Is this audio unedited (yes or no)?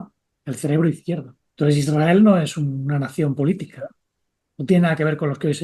no